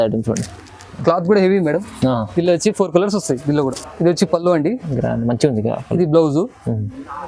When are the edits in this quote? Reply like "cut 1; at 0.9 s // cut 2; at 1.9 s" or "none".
cut 1; at 3.8 s

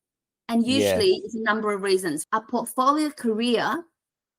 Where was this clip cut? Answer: cut 1; at 2.2 s

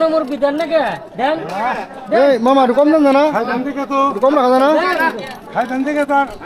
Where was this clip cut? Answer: none

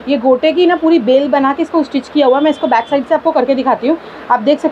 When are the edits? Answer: none

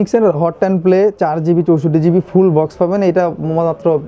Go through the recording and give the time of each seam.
none

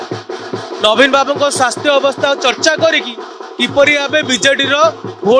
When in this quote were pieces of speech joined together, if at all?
none

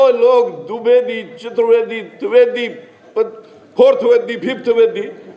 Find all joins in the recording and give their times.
none

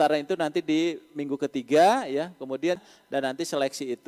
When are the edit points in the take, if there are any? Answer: cut 1; at 2.8 s

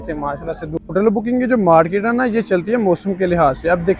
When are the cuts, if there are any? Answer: cut 1; at 0.9 s

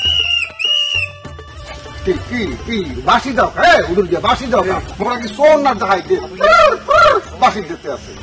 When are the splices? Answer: none

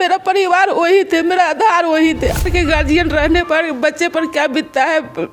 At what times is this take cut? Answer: cut 1; at 2.4 s

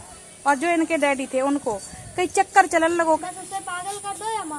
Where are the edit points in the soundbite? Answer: cut 1; at 3.2 s

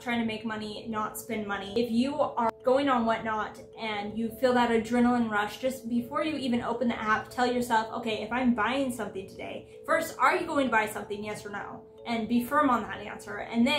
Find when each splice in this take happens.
cut 1; at 1.7 s // cut 2; at 2.6 s

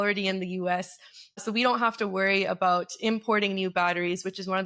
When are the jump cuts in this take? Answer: cut 1; at 1.4 s

